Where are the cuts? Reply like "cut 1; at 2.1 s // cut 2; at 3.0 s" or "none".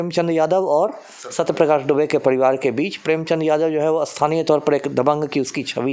none